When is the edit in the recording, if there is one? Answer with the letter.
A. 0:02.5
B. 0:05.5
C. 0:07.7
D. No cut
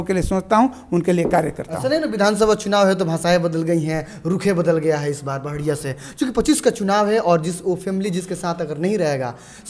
D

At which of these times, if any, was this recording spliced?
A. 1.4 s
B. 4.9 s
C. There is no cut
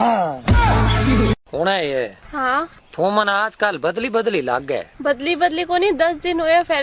A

